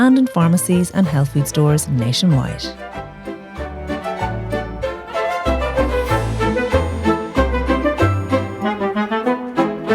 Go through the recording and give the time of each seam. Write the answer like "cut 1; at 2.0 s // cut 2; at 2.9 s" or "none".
cut 1; at 2.6 s